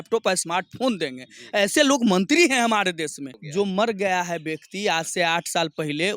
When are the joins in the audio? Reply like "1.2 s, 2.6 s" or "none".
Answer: 3.4 s